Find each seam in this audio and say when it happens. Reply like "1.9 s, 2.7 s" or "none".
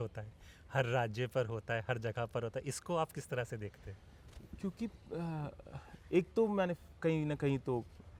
none